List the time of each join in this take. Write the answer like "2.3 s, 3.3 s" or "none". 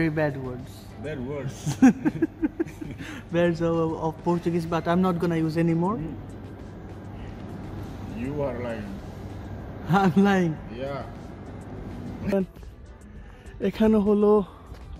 12.3 s